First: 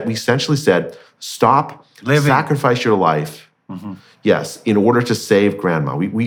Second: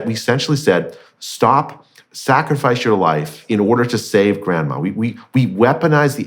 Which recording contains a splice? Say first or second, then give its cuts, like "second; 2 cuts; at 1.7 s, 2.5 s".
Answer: second; 1 cut; at 3.4 s